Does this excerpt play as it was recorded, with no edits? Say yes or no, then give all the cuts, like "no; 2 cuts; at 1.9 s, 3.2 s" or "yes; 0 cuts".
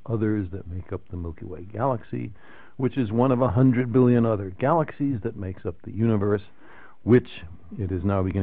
yes; 0 cuts